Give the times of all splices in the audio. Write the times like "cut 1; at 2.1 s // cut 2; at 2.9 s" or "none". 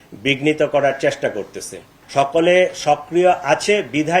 cut 1; at 1.9 s